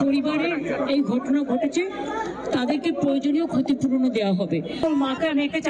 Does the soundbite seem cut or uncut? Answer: uncut